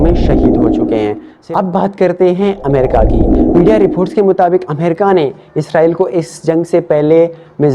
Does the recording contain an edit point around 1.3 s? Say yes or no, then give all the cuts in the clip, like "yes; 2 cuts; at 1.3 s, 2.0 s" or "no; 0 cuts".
yes; 1 cut; at 1.3 s